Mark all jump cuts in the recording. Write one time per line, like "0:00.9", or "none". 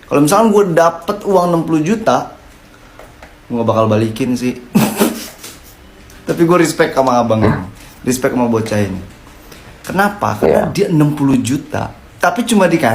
none